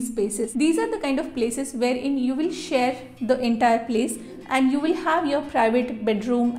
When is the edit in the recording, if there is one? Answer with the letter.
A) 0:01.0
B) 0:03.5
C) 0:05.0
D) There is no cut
D